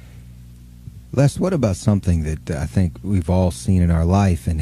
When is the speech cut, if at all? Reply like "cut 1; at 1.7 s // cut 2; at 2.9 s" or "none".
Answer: cut 1; at 2.7 s